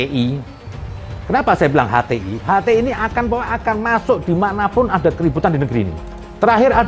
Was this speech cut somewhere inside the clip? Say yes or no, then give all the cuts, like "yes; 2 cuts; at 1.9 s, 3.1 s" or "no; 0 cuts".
yes; 1 cut; at 6.0 s